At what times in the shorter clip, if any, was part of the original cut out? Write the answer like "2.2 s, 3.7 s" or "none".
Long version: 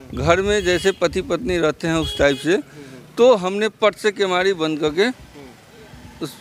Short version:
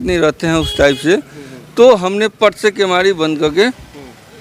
none